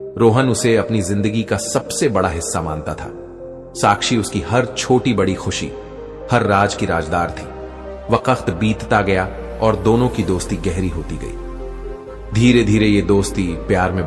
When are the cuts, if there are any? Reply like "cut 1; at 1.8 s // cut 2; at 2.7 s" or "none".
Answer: none